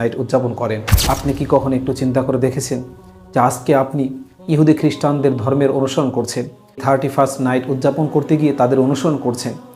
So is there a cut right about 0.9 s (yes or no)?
yes